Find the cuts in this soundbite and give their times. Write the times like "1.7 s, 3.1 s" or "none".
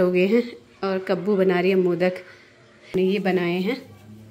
2.9 s